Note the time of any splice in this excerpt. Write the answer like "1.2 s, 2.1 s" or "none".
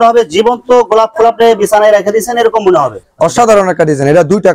3.0 s